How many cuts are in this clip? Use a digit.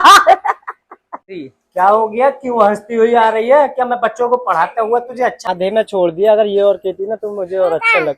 1